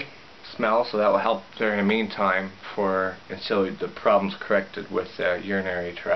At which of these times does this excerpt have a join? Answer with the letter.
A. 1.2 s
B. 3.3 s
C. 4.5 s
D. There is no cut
B